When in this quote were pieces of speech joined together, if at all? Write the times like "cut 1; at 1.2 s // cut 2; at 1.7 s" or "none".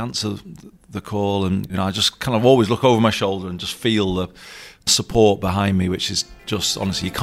cut 1; at 1.7 s // cut 2; at 4.9 s